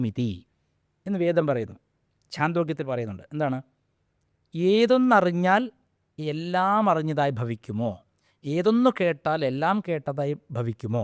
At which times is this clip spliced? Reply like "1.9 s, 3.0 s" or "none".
none